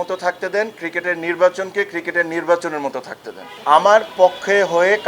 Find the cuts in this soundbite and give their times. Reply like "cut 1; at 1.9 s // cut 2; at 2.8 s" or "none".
cut 1; at 3.5 s